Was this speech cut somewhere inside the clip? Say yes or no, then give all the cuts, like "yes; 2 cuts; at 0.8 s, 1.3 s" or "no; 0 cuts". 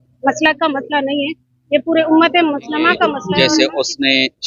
yes; 1 cut; at 3.2 s